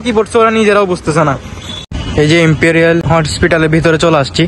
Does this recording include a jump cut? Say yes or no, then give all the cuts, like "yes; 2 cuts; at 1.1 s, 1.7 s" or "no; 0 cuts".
yes; 2 cuts; at 1.8 s, 3.0 s